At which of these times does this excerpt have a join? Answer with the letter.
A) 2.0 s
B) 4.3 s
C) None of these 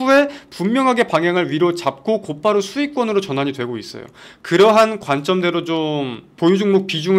B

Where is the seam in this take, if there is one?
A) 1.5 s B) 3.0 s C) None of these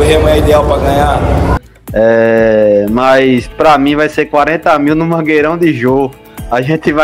A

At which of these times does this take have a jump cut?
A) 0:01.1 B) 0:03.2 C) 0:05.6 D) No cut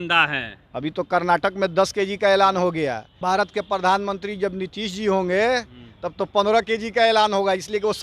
B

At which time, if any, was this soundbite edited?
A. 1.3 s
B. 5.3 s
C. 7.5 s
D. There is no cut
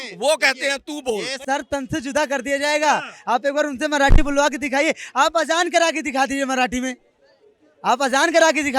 A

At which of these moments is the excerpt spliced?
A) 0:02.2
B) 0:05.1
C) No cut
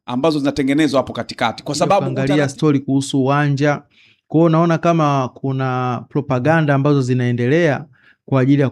A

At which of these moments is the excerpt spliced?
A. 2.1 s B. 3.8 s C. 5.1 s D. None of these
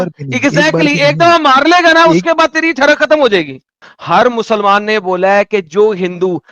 B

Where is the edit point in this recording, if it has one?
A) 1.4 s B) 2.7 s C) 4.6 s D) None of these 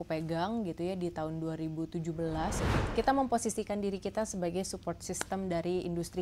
B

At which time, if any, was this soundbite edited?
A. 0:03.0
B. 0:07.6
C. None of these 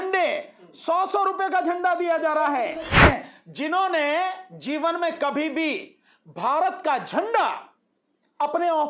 A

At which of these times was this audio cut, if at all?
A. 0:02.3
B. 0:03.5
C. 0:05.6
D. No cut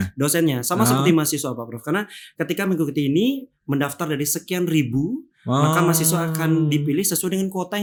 D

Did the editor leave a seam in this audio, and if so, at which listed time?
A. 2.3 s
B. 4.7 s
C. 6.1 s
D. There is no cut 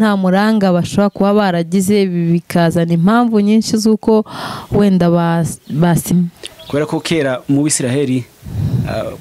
C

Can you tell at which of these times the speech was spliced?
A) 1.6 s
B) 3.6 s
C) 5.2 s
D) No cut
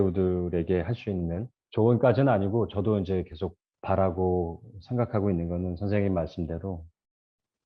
A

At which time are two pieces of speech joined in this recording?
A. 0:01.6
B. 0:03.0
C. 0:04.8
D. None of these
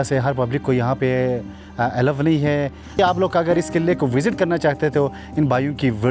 B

